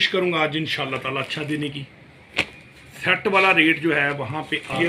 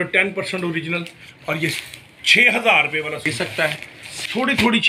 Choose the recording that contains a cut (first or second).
second